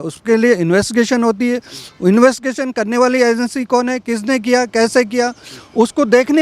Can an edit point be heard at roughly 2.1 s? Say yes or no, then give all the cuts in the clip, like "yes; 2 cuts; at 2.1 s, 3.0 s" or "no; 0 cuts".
no; 0 cuts